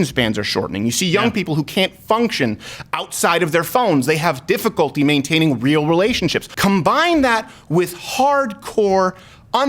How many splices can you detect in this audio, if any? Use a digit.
1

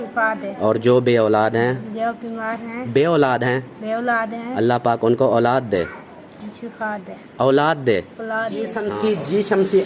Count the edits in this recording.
1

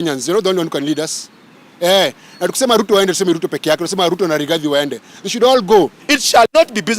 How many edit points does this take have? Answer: 1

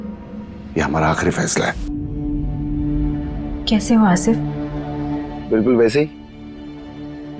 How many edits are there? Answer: 1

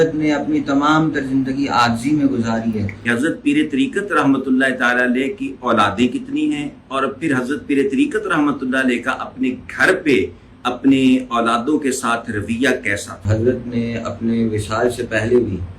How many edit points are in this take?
2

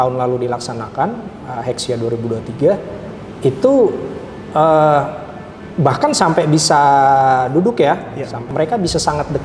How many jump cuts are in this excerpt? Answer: 1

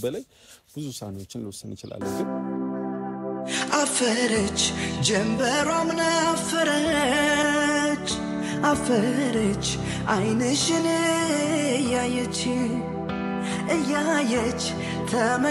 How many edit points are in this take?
1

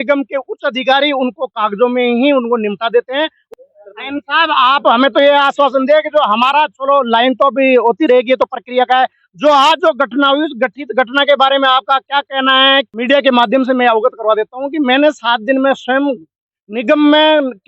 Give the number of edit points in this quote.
3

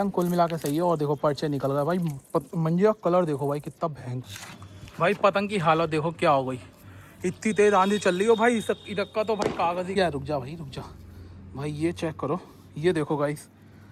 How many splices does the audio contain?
2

